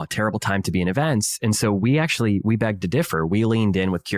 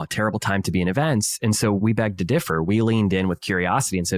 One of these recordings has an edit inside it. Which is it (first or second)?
second